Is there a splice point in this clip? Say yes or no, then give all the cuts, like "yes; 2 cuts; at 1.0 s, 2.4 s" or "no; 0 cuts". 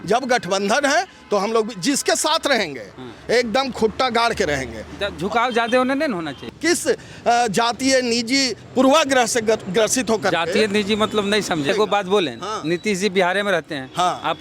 yes; 2 cuts; at 6.3 s, 11.7 s